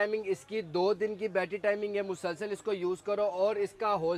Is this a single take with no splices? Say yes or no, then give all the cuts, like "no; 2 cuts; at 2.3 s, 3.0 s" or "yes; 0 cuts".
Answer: yes; 0 cuts